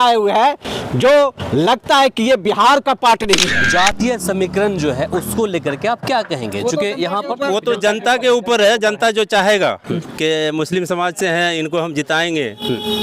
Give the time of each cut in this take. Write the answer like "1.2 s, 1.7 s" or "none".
3.6 s

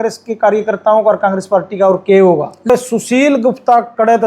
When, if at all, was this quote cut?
2.7 s

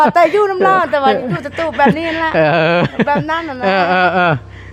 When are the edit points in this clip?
none

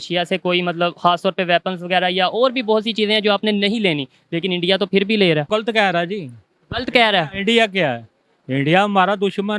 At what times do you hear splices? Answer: 5.5 s

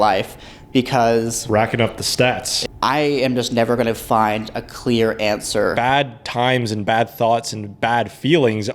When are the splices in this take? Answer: 2.5 s, 5.7 s

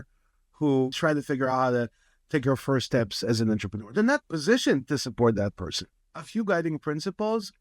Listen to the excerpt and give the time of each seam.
0.9 s, 6.0 s

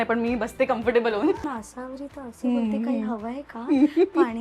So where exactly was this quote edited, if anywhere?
1.4 s

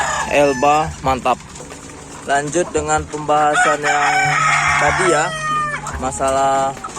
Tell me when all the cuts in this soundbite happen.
1.5 s

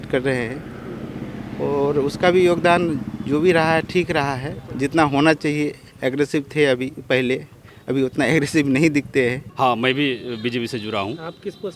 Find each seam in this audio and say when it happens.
9.4 s

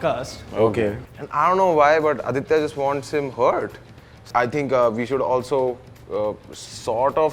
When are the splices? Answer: 1.0 s, 4.2 s

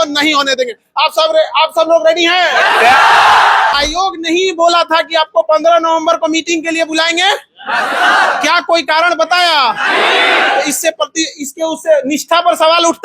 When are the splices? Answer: 3.7 s

